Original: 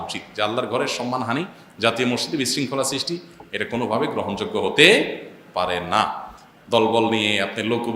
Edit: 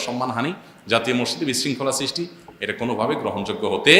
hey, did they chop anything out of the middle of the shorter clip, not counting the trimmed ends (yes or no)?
no